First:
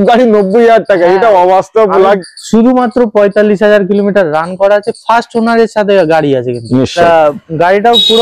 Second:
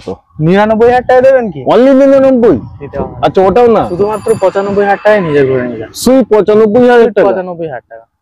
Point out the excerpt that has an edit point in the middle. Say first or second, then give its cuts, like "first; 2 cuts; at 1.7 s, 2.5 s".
first; 2 cuts; at 2.2 s, 7.0 s